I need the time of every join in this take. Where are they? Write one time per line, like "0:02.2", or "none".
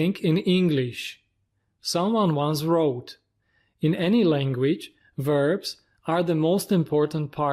none